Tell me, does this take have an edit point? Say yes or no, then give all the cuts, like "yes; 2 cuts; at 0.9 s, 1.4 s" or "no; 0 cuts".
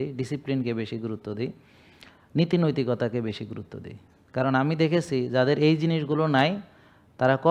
no; 0 cuts